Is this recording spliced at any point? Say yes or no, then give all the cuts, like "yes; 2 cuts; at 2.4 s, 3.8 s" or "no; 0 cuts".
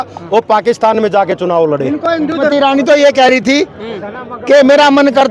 yes; 1 cut; at 2.5 s